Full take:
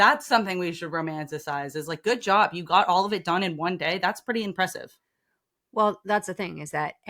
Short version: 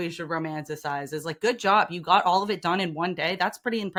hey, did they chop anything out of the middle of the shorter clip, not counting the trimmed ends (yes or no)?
no